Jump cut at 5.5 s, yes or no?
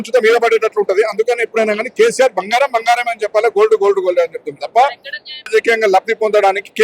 yes